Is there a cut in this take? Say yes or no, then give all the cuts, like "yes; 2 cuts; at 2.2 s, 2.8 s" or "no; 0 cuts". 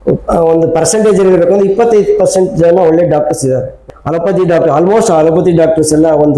yes; 1 cut; at 3.8 s